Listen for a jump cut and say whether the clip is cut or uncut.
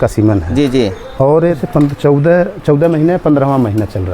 cut